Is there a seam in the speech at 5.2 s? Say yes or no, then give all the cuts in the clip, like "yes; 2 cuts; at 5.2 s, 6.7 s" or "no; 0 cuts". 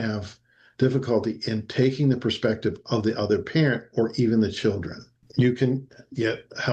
yes; 1 cut; at 5.2 s